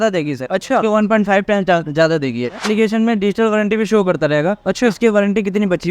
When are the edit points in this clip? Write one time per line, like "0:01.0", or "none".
0:02.6